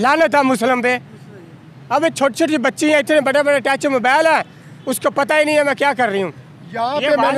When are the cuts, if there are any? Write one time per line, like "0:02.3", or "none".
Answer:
none